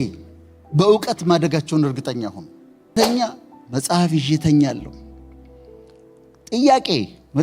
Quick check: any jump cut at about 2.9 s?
yes; 1 cut; at 2.9 s

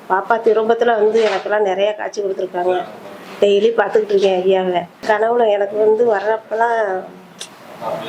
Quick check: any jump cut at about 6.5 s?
no; 1 cut; at 4.9 s

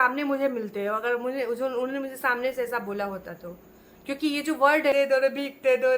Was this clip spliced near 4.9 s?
yes; 1 cut; at 4.9 s

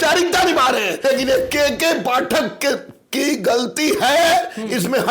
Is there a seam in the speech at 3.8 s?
no; 1 cut; at 1.0 s

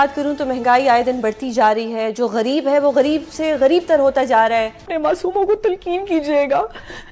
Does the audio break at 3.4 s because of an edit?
no; 1 cut; at 4.9 s

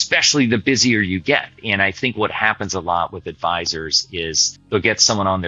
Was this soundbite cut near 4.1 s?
no; 1 cut; at 1.6 s

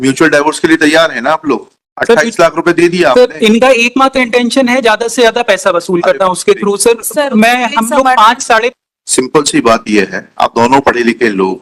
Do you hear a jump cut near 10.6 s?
no; 1 cut; at 8.7 s

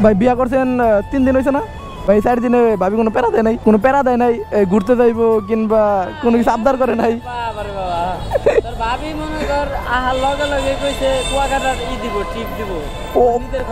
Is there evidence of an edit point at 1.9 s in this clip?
yes; 2 cuts; at 1.9 s, 3.6 s

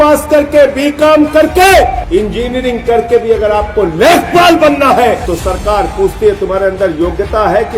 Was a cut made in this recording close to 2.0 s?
yes; 2 cuts; at 2.0 s, 5.2 s

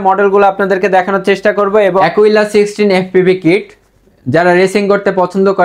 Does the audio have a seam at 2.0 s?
yes; 1 cut; at 2.0 s

